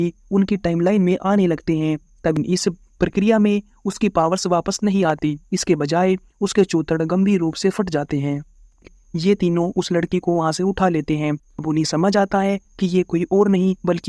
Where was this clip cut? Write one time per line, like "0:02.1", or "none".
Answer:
0:02.4
0:08.8
0:11.4